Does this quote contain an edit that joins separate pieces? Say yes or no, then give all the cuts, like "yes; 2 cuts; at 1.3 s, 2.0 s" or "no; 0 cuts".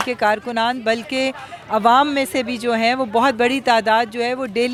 no; 0 cuts